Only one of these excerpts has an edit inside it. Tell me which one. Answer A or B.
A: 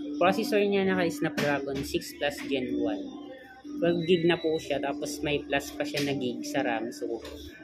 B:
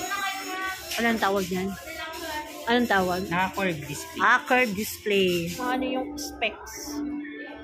B